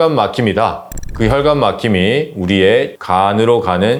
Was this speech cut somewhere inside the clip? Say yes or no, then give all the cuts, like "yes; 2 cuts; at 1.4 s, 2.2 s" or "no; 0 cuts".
no; 0 cuts